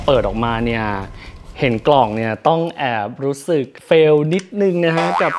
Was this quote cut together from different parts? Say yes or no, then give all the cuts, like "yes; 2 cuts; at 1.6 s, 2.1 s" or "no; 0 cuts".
no; 0 cuts